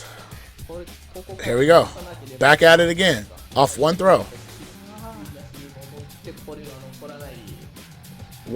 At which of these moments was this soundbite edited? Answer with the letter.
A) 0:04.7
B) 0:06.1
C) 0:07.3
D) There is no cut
A